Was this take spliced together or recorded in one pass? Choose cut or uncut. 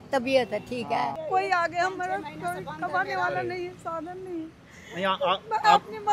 cut